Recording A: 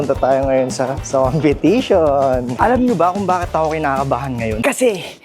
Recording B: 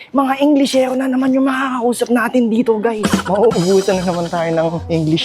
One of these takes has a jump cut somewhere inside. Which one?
A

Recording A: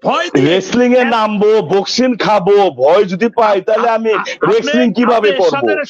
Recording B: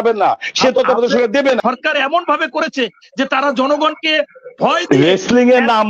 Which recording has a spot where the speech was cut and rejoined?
B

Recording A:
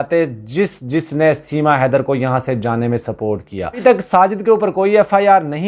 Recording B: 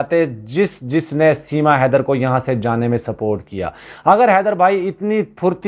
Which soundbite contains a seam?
A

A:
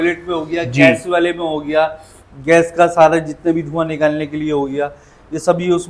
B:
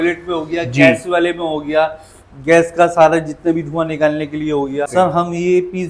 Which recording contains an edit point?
B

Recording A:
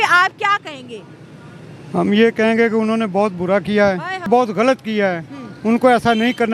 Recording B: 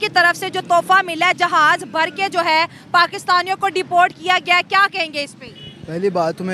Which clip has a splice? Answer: A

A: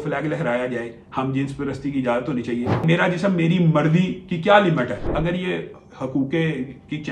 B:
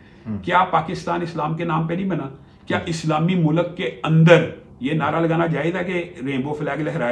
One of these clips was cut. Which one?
A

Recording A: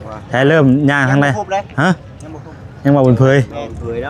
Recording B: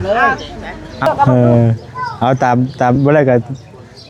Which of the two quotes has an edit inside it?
B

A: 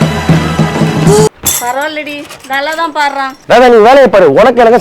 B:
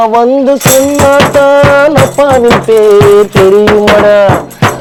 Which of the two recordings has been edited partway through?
A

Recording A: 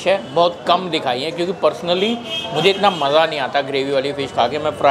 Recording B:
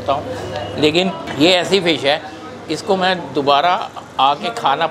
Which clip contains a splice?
B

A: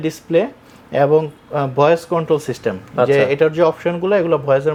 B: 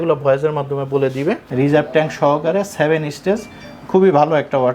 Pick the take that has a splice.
B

